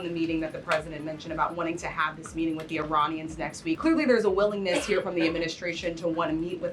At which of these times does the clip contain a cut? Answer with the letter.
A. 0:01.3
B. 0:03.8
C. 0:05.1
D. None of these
B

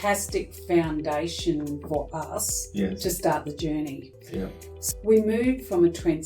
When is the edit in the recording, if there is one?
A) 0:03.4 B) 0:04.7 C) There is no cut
B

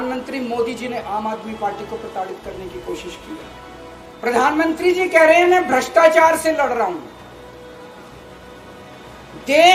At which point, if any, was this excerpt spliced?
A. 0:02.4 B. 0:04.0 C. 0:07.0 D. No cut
B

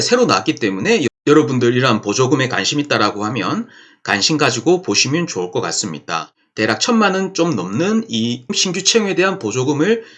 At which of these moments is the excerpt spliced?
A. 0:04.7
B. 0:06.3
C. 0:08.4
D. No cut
B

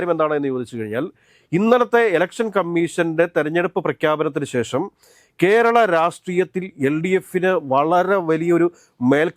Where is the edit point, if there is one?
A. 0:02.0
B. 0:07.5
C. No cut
C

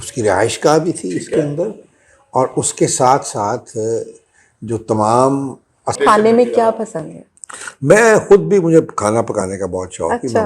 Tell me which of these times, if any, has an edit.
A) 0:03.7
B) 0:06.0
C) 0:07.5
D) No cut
B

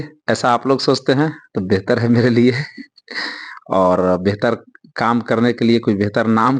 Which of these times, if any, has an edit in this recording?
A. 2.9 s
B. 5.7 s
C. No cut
C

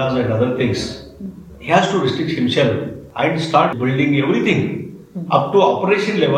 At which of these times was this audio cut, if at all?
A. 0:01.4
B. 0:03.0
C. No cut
B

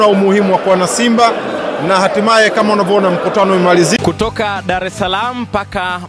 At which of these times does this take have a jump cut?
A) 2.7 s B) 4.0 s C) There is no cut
B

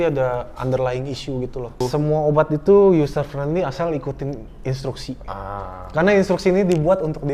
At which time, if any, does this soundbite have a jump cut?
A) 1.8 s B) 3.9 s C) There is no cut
A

